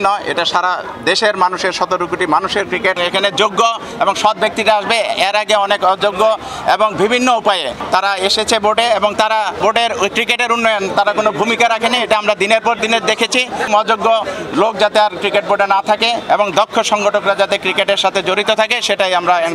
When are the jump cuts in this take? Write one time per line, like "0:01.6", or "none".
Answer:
0:03.0
0:07.8
0:09.6
0:13.7